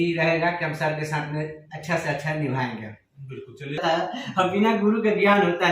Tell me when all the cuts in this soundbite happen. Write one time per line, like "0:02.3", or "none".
0:03.8